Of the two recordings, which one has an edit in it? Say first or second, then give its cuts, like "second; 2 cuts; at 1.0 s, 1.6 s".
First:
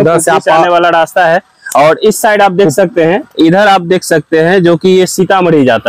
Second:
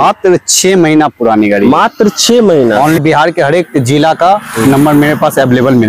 second; 1 cut; at 3.0 s